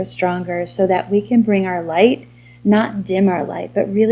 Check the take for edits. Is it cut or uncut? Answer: uncut